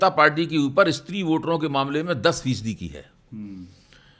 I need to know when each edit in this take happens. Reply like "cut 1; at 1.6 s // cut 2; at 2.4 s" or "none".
none